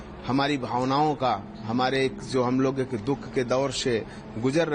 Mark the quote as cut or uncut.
uncut